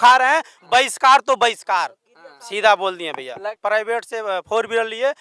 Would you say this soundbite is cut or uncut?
cut